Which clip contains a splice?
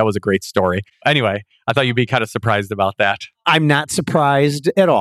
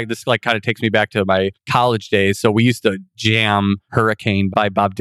first; 1 cut; at 1.0 s

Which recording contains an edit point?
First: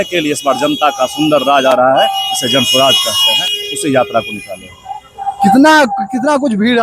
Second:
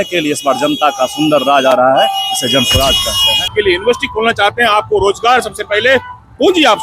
second; 1 cut; at 3.5 s

